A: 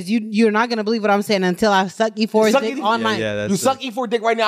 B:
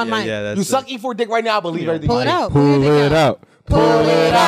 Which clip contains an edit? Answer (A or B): B